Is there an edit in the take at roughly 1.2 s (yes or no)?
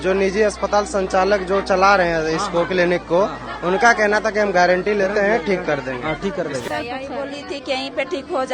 no